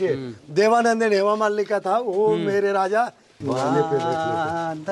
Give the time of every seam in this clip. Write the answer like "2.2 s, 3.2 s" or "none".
3.3 s